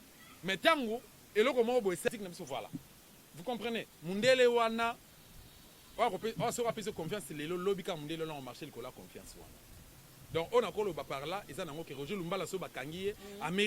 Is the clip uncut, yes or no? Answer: no